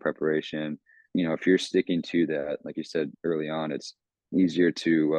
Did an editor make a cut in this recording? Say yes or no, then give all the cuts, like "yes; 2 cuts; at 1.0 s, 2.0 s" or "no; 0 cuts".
yes; 1 cut; at 1.0 s